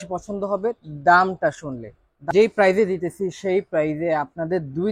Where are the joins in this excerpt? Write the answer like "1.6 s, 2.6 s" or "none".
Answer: 2.2 s

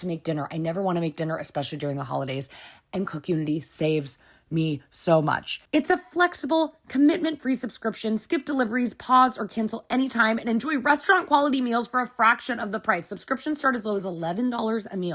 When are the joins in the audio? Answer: 5.7 s

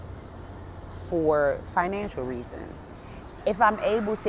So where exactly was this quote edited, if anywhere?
3.2 s

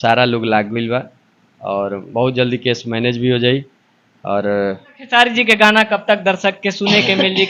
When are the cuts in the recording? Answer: 4.9 s

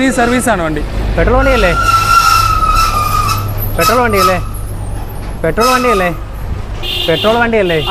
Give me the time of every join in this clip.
none

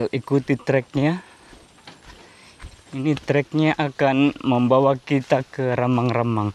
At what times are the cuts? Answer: none

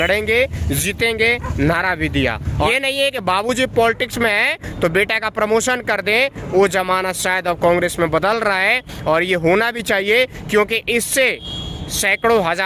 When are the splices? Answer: 2.7 s

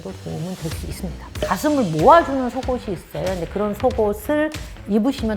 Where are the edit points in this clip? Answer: 1.3 s

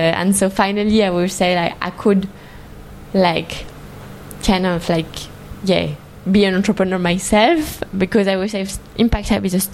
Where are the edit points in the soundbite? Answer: 7.8 s

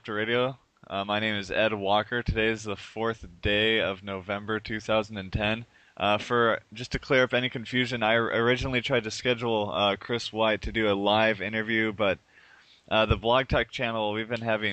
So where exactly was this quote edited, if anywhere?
1.9 s

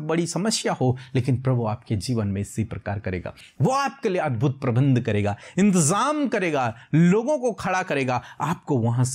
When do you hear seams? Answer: 3.4 s

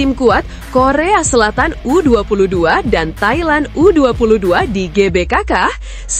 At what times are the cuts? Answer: none

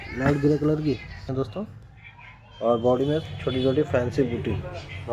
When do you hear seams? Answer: 1.2 s

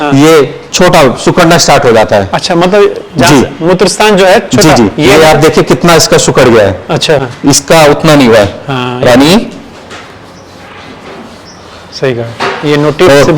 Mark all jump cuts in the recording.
7.2 s

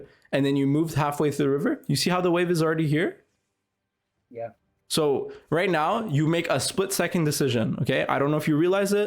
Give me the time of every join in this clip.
none

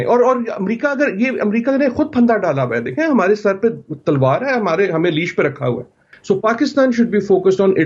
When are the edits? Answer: 6.1 s

